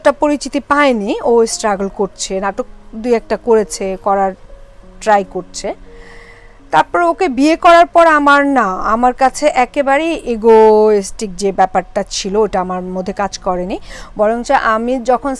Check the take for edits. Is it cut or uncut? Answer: uncut